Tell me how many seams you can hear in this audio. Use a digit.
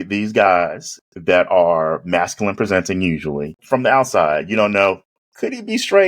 1